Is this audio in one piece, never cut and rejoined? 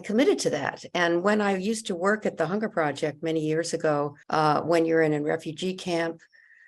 no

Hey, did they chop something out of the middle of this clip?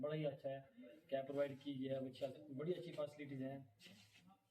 no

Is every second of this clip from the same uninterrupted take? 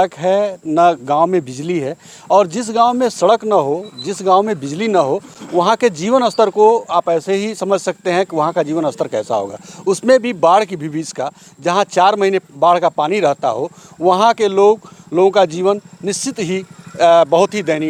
yes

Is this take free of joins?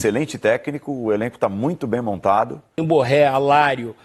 no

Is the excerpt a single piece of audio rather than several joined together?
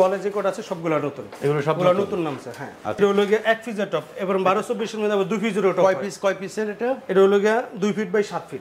no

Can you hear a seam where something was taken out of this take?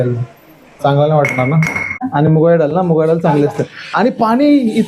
yes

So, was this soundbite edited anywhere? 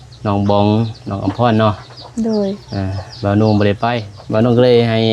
yes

